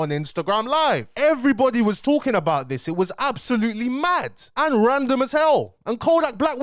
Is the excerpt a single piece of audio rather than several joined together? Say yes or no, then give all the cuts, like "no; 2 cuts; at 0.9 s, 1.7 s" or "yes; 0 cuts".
yes; 0 cuts